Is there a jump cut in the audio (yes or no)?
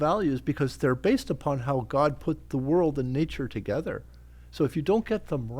no